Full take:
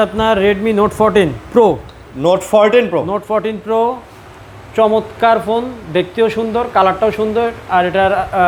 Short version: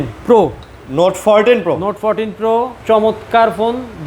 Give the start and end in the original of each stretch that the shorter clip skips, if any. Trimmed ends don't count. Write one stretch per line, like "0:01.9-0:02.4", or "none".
0:04.0-0:04.6